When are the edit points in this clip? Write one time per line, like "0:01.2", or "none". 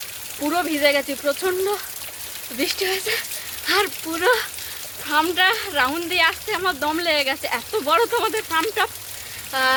none